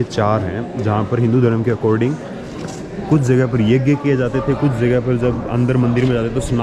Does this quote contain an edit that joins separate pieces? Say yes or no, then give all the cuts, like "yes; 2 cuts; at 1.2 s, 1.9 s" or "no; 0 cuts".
no; 0 cuts